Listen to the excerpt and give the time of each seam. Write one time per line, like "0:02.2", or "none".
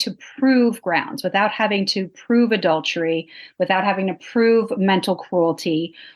none